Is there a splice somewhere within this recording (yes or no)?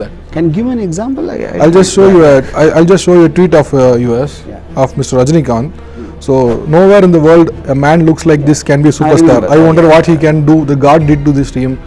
no